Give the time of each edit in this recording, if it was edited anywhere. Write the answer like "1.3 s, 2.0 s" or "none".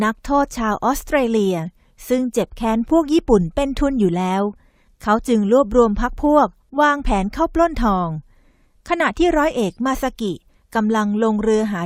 7.5 s